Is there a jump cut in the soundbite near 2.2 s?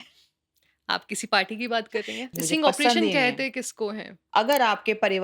yes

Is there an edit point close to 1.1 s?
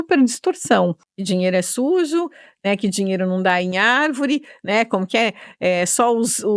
yes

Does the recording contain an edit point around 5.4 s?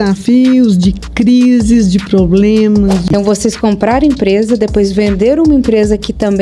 no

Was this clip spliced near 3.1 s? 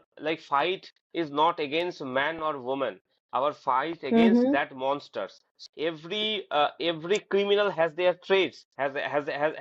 no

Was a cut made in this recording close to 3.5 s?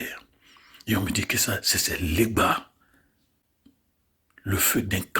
yes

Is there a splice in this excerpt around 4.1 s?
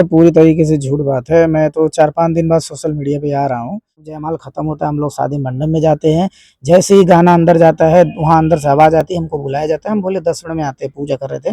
yes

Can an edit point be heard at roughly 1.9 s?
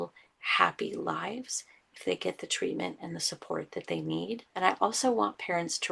no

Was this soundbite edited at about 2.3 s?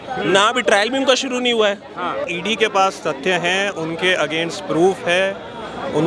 yes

